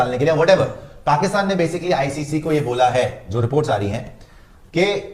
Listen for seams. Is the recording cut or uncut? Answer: uncut